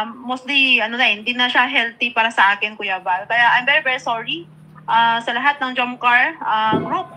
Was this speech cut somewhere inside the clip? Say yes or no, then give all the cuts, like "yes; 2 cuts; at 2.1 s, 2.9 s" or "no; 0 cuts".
no; 0 cuts